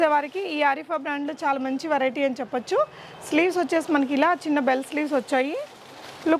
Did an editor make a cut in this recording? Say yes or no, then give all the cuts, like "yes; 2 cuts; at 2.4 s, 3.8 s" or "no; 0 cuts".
no; 0 cuts